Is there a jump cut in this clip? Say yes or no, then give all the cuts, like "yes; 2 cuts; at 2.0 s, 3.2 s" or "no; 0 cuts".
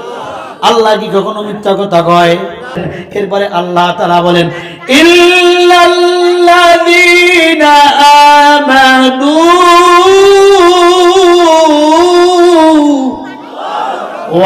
yes; 1 cut; at 2.9 s